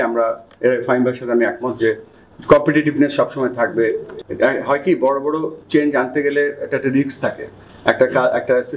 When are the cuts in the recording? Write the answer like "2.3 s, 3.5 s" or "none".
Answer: 4.1 s